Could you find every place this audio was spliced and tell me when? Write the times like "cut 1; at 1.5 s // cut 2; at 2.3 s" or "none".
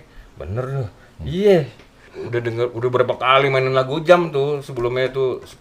cut 1; at 2.1 s